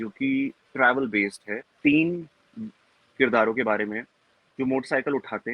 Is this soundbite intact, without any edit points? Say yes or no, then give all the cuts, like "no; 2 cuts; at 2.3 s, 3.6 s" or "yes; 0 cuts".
no; 1 cut; at 1.7 s